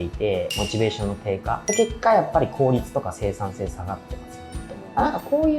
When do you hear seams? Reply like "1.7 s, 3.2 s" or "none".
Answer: 1.6 s